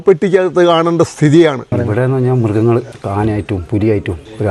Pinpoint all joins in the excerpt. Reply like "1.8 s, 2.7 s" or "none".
1.7 s